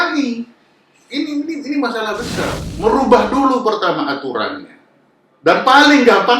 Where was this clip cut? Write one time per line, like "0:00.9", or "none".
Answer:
0:02.6